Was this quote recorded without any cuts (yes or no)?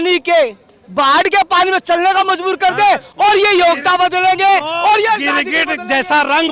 yes